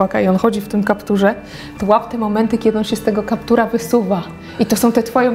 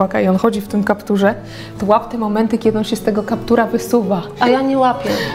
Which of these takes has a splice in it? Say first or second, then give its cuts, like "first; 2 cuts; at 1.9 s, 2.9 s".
second; 1 cut; at 4.4 s